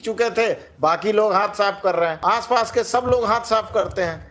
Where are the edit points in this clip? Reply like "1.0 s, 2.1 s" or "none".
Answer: 2.2 s